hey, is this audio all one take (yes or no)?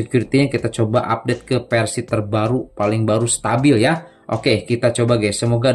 yes